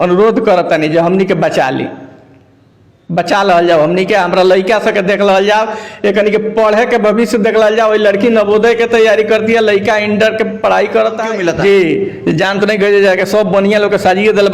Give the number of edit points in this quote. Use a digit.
1